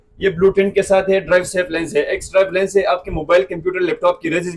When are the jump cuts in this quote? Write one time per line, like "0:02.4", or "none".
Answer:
none